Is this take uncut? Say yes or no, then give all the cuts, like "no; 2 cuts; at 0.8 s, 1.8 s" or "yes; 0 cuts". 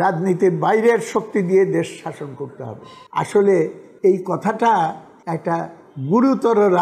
yes; 0 cuts